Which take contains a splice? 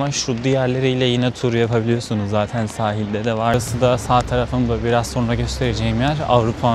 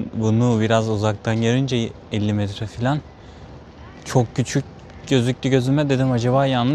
first; 1 cut; at 3.5 s

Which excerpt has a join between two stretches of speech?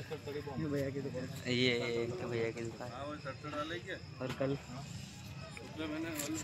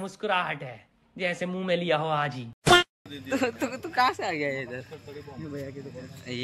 second; 2 cuts; at 2.4 s, 3.0 s

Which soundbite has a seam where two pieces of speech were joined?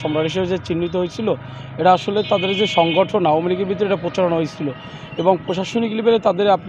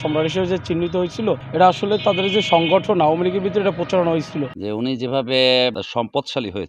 second; 3 cuts; at 1.5 s, 4.6 s, 5.7 s

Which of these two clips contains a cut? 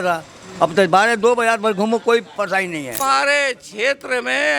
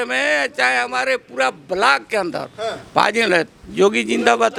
first; 1 cut; at 3.0 s

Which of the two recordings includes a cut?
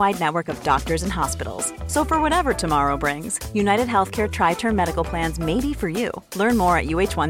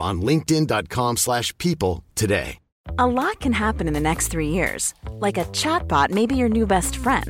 second; 1 cut; at 2.8 s

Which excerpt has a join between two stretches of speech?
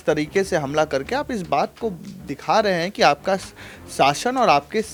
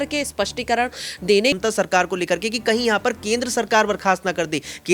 second; 1 cut; at 1.6 s

